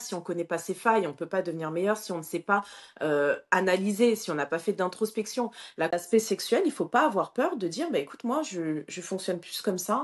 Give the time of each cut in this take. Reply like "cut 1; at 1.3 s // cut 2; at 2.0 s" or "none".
cut 1; at 5.9 s